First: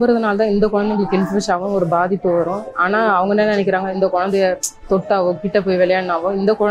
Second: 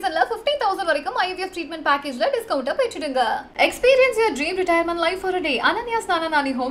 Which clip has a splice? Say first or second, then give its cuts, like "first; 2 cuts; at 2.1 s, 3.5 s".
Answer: first; 2 cuts; at 2.7 s, 3.9 s